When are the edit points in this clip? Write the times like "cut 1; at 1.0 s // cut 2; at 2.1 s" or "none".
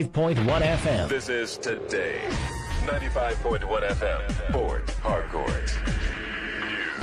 cut 1; at 1.1 s